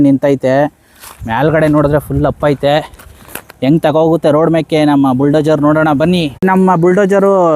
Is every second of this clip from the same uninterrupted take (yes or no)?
no